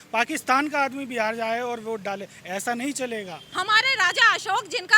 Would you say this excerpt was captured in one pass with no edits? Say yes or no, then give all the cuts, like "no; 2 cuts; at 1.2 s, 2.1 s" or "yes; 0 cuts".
no; 1 cut; at 3.4 s